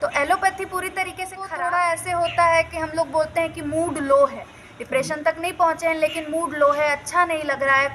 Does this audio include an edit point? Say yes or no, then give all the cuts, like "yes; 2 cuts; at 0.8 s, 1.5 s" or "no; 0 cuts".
yes; 1 cut; at 1.5 s